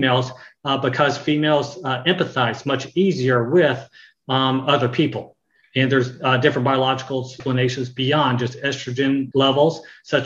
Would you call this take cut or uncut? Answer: cut